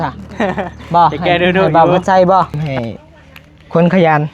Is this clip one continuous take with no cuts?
no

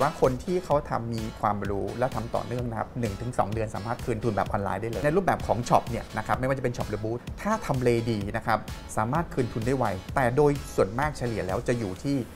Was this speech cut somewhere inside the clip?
yes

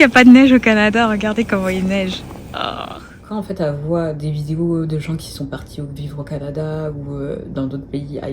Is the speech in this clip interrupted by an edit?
yes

